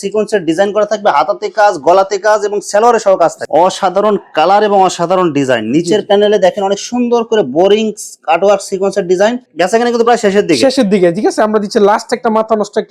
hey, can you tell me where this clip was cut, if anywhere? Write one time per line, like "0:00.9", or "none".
0:03.4
0:09.4